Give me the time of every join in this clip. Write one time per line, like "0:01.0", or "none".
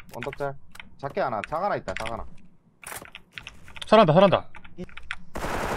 0:04.7